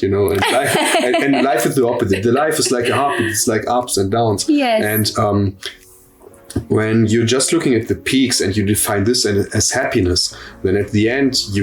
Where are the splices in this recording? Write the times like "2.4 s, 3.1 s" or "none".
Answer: none